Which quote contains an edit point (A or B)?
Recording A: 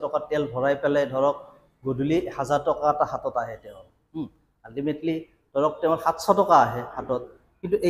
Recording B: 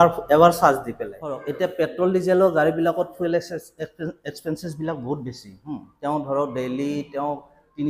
B